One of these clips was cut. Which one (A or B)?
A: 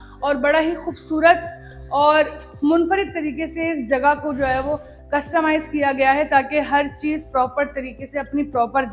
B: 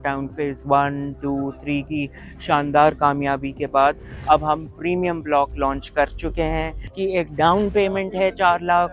B